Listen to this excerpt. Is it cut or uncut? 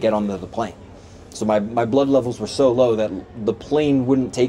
uncut